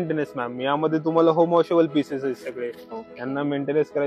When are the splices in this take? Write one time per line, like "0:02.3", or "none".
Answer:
none